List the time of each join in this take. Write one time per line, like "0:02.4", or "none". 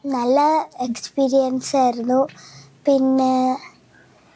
none